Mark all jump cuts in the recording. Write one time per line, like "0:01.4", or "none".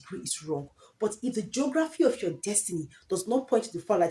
none